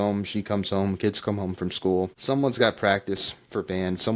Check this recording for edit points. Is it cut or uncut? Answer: cut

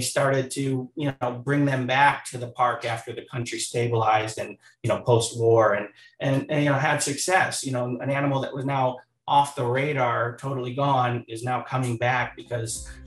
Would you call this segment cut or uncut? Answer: uncut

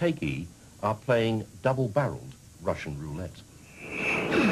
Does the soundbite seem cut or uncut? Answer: cut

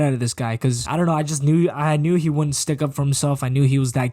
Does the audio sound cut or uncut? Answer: uncut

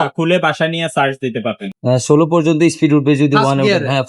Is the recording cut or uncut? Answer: cut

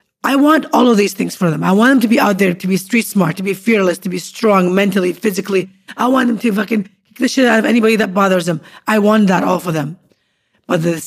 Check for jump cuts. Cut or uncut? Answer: uncut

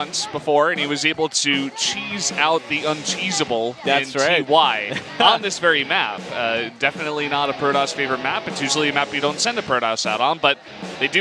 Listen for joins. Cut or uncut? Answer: cut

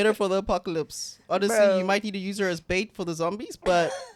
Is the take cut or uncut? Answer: uncut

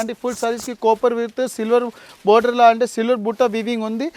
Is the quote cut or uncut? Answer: uncut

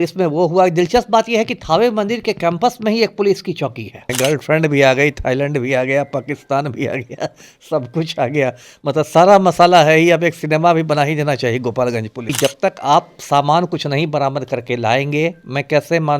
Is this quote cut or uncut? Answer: cut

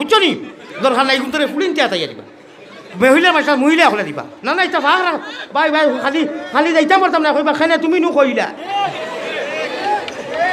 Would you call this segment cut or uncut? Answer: uncut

